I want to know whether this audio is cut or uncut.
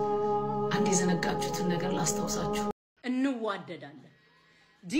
cut